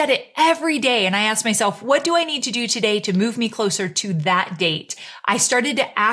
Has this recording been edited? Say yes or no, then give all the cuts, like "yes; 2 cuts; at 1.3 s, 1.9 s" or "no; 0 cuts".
yes; 1 cut; at 5.1 s